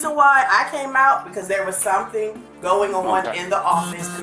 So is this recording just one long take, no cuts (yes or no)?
yes